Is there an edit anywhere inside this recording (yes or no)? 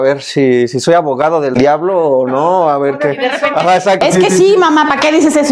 no